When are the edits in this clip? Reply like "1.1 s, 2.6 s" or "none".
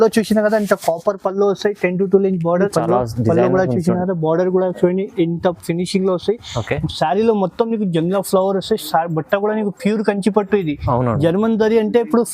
2.7 s